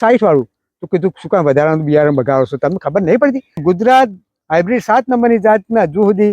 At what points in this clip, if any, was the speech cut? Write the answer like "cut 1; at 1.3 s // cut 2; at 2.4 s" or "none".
cut 1; at 3.6 s